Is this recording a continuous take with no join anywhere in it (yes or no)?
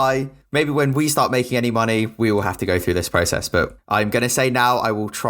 no